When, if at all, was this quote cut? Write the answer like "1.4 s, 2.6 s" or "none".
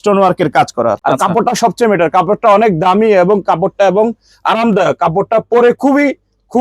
1.0 s